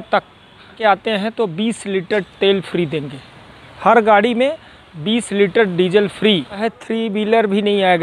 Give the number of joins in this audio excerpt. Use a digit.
2